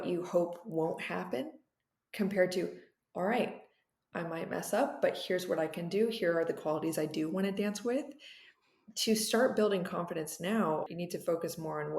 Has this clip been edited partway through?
yes; 1 cut; at 10.9 s

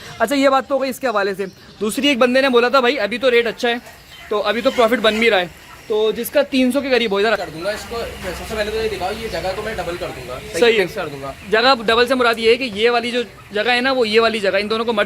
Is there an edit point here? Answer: yes; 1 cut; at 7.4 s

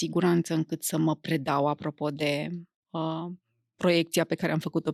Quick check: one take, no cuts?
yes; 0 cuts

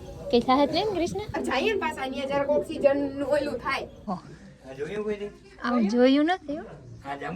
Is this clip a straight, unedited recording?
no; 2 cuts; at 1.4 s, 4.1 s

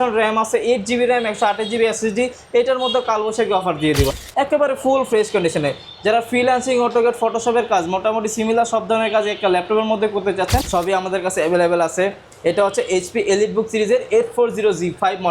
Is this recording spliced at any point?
yes; 2 cuts; at 4.2 s, 10.7 s

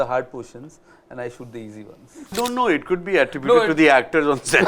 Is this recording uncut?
no; 1 cut; at 2.3 s

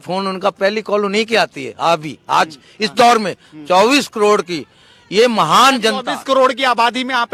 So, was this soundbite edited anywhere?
no; 0 cuts

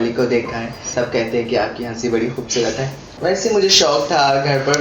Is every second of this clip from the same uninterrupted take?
no; 2 cuts; at 0.9 s, 3.0 s

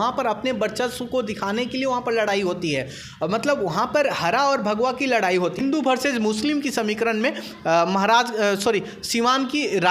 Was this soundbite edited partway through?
yes; 1 cut; at 5.6 s

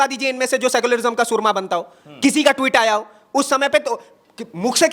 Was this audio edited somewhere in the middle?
no; 0 cuts

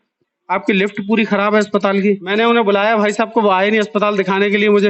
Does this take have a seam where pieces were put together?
yes; 1 cut; at 2.2 s

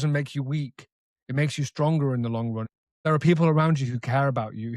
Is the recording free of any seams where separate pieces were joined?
no; 1 cut; at 2.6 s

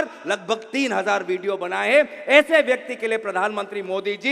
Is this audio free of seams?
yes; 0 cuts

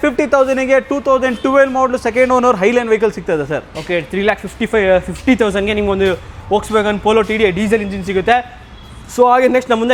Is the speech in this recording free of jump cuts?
yes; 0 cuts

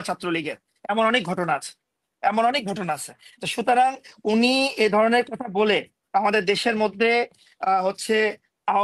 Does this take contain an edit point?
no; 0 cuts

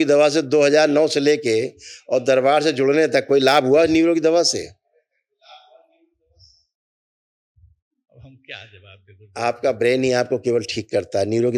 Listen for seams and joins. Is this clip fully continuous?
yes; 0 cuts

